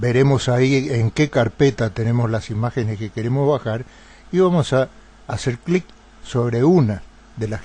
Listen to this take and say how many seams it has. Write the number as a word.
one